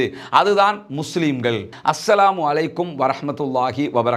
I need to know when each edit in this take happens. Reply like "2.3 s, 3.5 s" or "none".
1.7 s